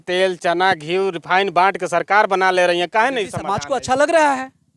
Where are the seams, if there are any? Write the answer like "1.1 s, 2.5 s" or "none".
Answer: 3.5 s